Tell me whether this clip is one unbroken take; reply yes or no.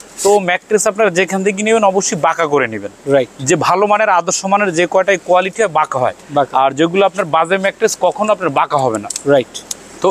yes